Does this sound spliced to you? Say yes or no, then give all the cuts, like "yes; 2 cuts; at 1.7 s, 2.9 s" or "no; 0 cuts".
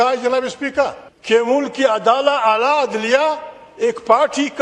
yes; 1 cut; at 1.1 s